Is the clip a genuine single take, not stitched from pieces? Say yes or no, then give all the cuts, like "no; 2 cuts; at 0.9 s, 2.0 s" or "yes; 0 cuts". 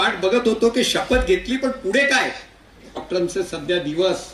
no; 1 cut; at 3.0 s